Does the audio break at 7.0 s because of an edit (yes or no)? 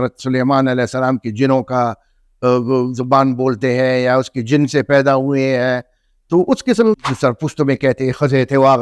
yes